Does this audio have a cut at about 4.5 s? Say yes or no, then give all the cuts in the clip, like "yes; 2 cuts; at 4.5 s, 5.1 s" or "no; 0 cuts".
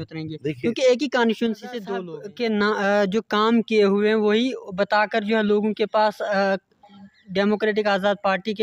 no; 1 cut; at 1.9 s